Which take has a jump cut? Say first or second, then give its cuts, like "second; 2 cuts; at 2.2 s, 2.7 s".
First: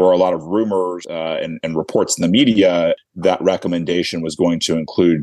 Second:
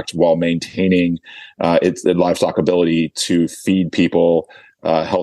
first; 2 cuts; at 1.0 s, 3.1 s